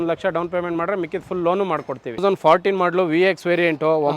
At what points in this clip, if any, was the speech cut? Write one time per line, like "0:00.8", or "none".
0:02.2